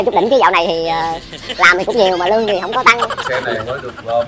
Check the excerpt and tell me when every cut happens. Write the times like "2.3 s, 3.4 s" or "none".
3.1 s